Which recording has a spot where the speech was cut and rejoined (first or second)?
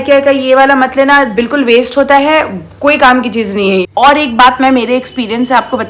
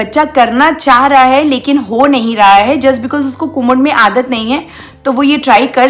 first